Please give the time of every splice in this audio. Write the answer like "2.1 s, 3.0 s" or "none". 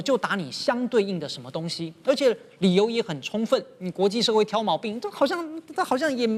none

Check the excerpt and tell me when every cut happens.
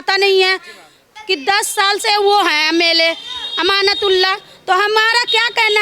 1.1 s

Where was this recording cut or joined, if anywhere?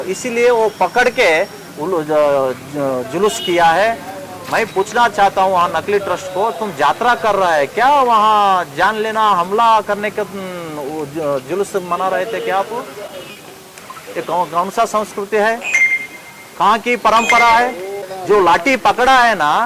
none

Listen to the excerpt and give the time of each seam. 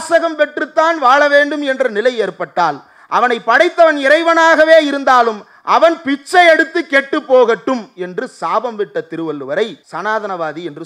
9.8 s

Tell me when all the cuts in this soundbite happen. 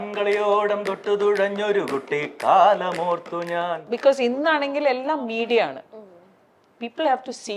3.9 s

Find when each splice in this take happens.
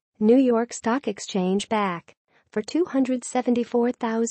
none

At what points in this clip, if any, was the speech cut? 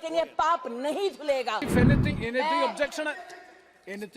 1.7 s

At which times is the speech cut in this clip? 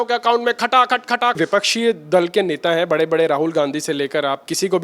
1.4 s

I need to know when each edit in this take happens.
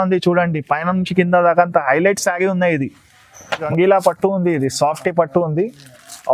3.6 s

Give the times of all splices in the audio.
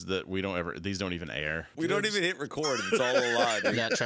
1.7 s

